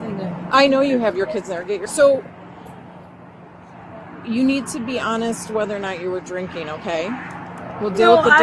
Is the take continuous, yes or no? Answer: no